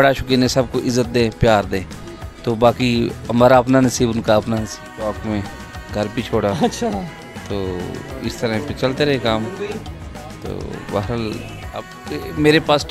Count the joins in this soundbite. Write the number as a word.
two